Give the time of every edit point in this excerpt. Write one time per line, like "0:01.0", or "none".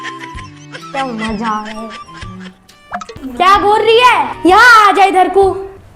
0:03.2